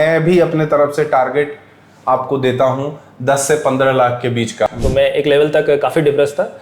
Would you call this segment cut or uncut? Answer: cut